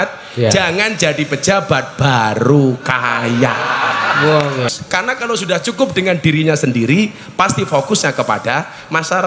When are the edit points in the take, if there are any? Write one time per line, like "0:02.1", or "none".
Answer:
0:04.8